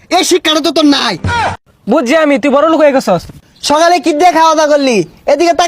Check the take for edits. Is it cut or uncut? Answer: cut